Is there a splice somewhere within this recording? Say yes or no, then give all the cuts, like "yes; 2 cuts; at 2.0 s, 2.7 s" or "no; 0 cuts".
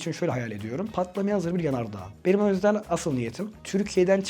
yes; 1 cut; at 2.1 s